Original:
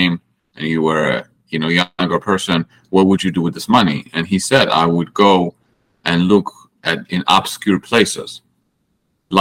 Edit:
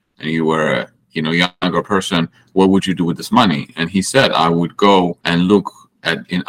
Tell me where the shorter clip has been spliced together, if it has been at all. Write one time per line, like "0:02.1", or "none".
0:05.2

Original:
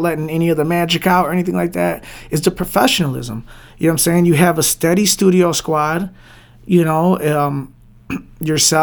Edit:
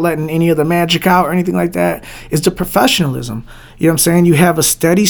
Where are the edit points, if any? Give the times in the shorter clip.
none

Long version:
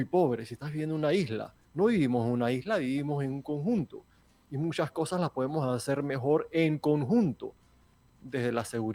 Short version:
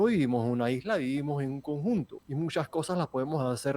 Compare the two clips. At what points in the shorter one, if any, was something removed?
0:02.2

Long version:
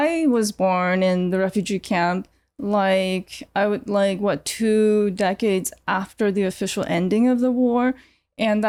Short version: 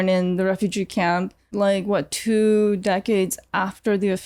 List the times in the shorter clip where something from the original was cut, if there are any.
0:01.5

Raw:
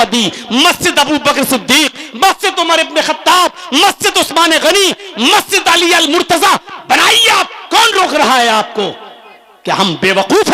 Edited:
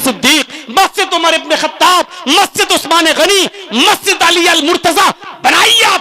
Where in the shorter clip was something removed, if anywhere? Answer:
none

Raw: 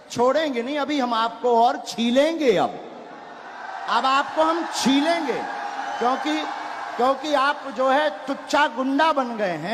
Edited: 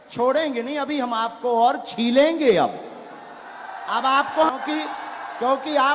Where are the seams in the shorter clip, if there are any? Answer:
0:04.5

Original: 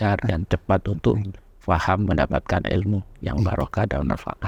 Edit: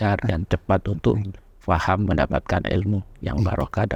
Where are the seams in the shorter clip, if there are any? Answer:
none

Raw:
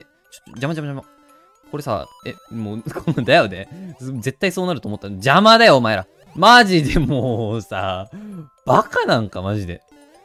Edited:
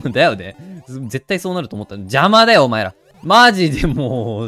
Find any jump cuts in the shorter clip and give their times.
none

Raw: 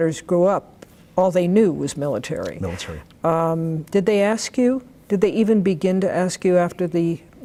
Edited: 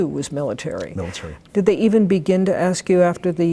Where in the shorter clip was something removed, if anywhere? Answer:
0:01.4

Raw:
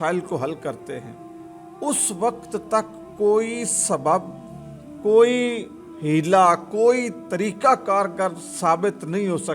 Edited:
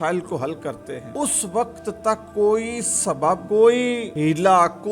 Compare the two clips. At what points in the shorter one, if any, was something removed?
0:01.0
0:02.2
0:03.4
0:04.1

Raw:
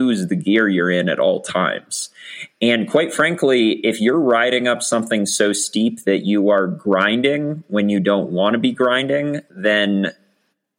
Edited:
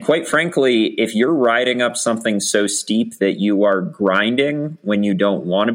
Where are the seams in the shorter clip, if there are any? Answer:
none

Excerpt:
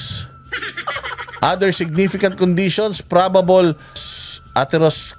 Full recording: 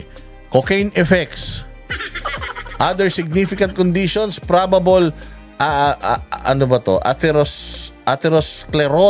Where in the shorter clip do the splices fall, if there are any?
0:04.1

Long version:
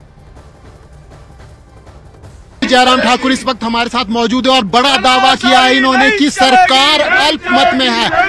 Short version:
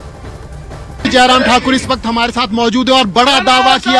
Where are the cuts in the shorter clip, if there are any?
0:01.0

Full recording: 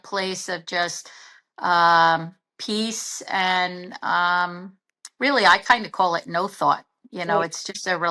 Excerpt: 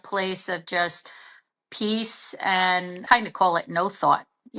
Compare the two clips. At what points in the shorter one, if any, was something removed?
0:01.5
0:03.0

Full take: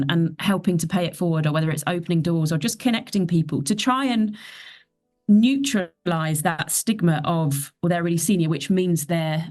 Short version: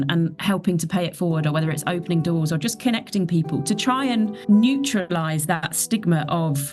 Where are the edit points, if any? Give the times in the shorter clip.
0:04.4
0:05.1

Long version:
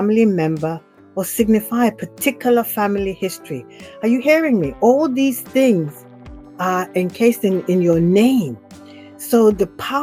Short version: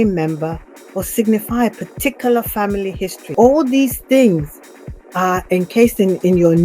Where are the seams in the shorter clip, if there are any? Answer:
0:03.3

